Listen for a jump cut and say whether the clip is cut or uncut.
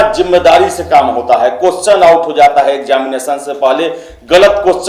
uncut